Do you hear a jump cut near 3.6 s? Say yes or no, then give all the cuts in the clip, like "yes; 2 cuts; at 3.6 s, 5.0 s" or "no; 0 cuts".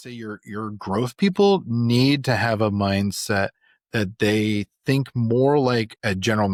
no; 0 cuts